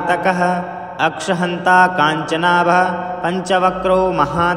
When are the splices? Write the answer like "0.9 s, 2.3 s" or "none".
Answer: none